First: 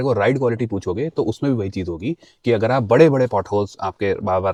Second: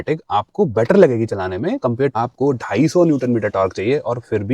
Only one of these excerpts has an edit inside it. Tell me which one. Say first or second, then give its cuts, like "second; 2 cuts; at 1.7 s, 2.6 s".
second; 1 cut; at 2.1 s